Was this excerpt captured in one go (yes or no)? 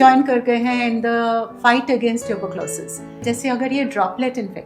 no